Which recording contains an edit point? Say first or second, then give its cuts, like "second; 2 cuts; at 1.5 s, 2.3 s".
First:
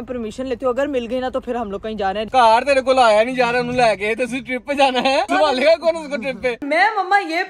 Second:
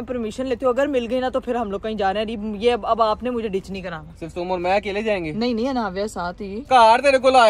first; 2 cuts; at 2.3 s, 6.6 s